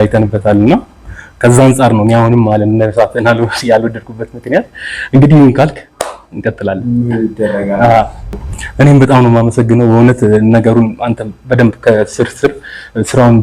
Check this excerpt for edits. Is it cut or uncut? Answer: cut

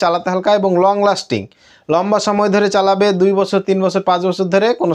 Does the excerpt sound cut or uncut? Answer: uncut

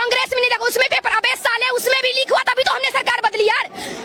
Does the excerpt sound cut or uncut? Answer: uncut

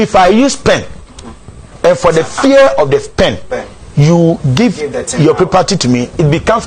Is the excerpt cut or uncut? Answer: uncut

